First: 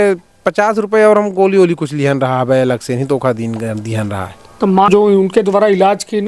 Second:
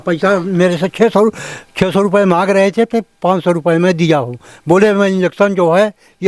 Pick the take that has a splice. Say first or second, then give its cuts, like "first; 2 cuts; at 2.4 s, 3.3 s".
first; 1 cut; at 4.9 s